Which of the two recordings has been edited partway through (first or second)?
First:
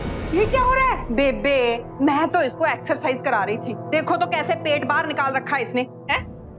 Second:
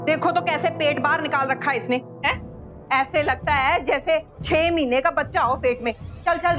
first